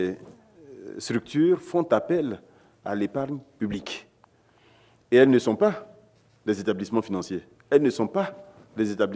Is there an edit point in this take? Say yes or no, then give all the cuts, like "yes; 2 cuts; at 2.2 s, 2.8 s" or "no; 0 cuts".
no; 0 cuts